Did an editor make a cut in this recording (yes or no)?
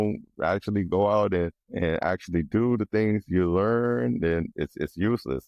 yes